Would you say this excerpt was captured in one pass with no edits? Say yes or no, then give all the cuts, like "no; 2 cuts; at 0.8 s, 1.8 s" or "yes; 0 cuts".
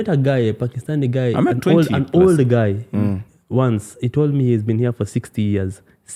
yes; 0 cuts